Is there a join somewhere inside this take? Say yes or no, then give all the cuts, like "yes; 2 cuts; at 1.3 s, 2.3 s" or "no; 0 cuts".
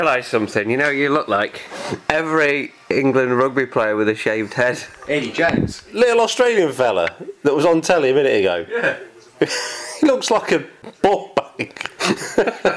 yes; 4 cuts; at 1.7 s, 4.9 s, 5.8 s, 10.8 s